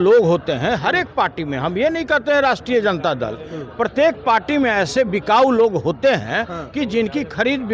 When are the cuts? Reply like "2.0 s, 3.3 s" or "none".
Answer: none